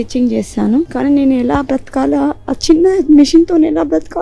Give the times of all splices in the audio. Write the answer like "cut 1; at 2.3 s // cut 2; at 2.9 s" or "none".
cut 1; at 0.9 s